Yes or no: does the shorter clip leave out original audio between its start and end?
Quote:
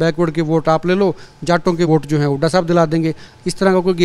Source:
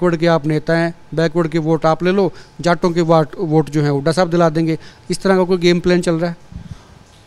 yes